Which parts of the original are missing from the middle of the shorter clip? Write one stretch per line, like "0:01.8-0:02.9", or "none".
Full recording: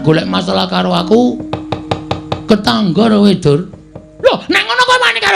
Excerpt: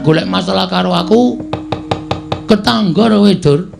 none